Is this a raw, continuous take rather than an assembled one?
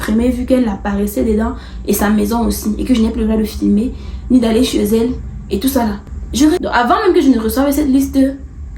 no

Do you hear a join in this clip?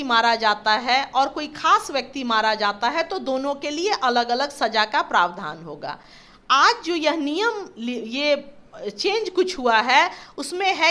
no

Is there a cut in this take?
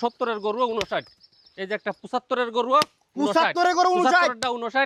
no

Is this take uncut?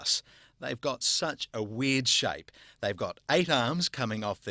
no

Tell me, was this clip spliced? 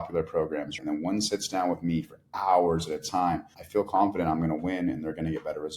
yes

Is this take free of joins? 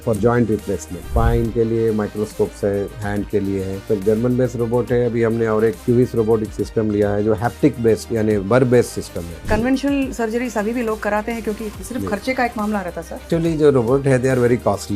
no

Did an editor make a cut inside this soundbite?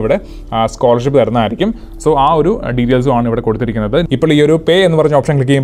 yes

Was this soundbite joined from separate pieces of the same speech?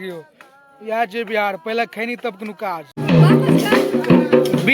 yes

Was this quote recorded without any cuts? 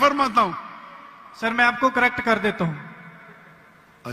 yes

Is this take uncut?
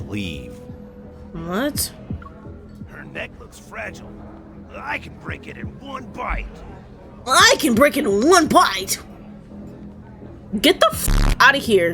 yes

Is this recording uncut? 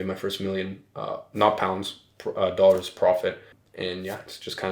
no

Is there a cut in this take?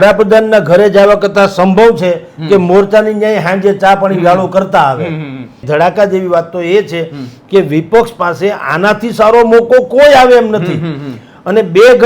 yes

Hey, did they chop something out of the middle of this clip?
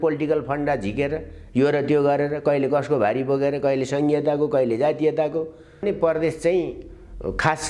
yes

